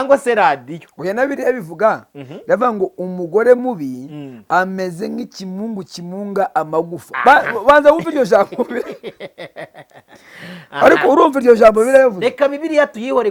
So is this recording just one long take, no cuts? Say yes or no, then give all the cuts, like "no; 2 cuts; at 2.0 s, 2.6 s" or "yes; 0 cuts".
yes; 0 cuts